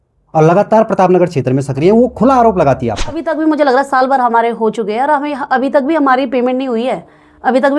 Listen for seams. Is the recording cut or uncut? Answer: cut